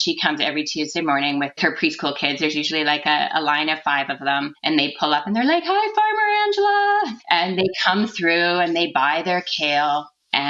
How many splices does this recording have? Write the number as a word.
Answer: two